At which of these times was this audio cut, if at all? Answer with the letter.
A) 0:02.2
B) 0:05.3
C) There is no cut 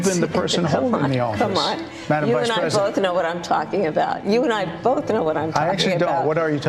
C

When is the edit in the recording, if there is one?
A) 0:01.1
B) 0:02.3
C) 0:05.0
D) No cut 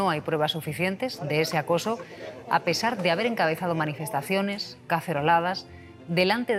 D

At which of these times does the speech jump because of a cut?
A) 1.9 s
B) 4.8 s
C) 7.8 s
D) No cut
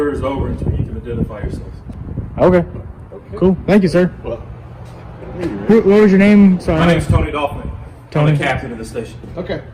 D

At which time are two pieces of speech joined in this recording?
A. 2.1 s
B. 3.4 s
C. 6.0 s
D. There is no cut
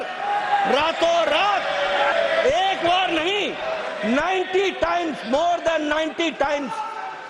A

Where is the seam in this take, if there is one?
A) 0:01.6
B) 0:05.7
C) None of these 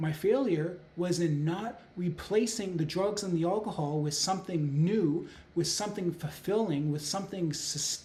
C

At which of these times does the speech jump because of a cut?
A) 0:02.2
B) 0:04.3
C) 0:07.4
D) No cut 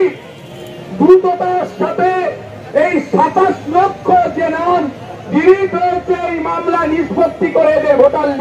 D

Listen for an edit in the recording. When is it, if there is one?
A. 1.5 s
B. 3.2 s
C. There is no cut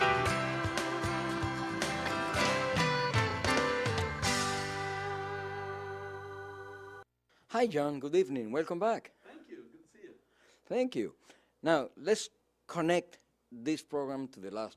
B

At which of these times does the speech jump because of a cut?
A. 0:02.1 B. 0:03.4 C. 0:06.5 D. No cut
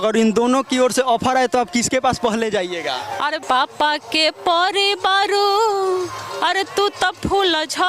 B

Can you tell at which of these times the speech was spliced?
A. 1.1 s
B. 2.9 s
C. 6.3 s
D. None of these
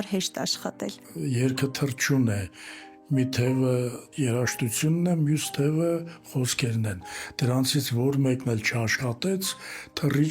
A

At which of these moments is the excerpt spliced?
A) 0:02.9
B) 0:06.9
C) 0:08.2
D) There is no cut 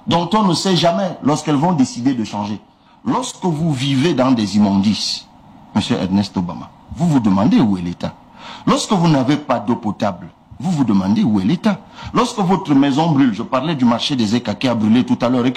A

